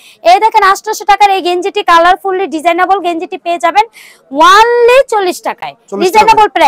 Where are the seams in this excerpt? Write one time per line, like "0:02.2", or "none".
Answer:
none